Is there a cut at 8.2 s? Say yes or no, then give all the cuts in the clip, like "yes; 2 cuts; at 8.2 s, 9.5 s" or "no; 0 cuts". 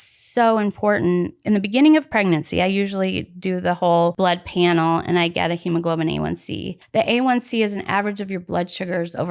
no; 4 cuts; at 1.4 s, 2.1 s, 4.2 s, 6.7 s